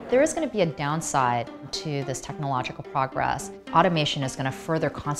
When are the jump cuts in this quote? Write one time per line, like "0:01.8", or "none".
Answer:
0:01.7
0:03.5